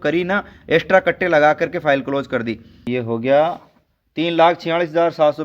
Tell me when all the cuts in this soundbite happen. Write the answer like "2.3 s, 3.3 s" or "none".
2.9 s